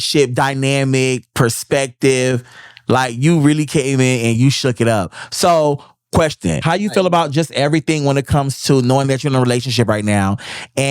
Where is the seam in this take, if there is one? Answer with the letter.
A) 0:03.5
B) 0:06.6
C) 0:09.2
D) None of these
B